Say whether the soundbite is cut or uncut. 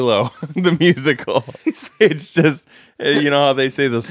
cut